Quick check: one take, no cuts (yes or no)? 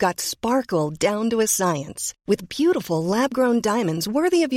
yes